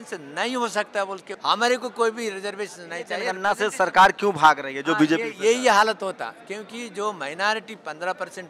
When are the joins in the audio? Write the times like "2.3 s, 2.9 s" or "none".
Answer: 1.3 s, 3.3 s